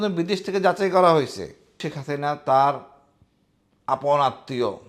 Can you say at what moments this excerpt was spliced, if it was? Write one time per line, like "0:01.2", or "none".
0:01.9